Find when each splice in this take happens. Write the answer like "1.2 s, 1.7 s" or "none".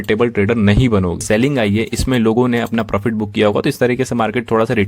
1.2 s